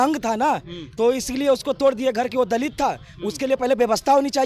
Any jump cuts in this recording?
no; 0 cuts

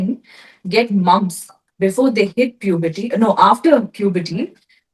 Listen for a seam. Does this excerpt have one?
no; 0 cuts

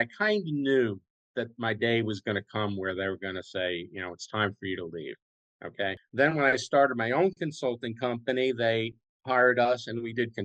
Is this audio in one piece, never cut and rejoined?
no; 1 cut; at 6.0 s

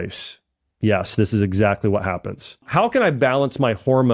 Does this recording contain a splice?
yes; 1 cut; at 2.6 s

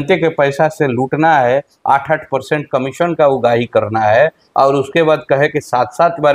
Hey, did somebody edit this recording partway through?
no; 0 cuts

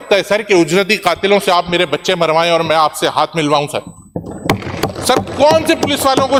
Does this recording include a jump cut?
no; 0 cuts

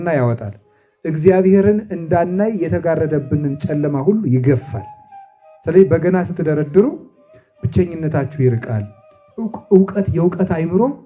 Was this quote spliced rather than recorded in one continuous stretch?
no; 0 cuts

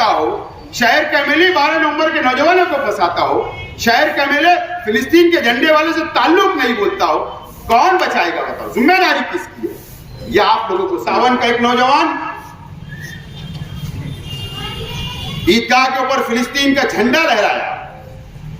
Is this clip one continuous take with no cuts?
no; 1 cut; at 11.1 s

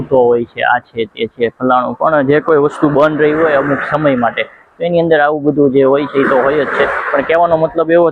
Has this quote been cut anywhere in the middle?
no; 0 cuts

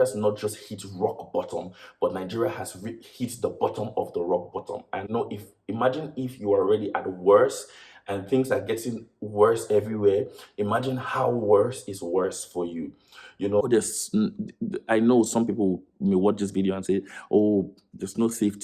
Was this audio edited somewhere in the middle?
yes; 2 cuts; at 5.1 s, 13.6 s

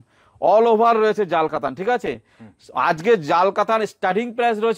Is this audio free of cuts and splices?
yes; 0 cuts

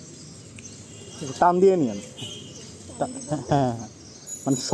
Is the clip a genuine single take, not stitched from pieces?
yes; 0 cuts

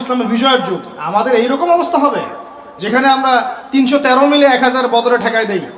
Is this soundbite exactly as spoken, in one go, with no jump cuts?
yes; 0 cuts

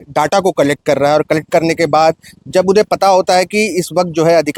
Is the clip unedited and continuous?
yes; 0 cuts

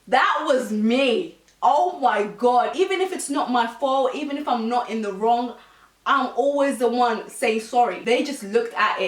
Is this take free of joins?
no; 2 cuts; at 2.7 s, 8.0 s

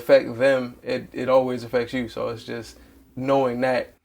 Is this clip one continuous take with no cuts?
yes; 0 cuts

